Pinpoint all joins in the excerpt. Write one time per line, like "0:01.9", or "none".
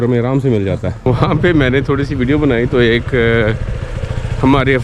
0:01.1